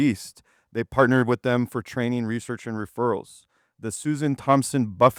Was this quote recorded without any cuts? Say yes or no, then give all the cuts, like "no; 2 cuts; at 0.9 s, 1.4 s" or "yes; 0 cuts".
yes; 0 cuts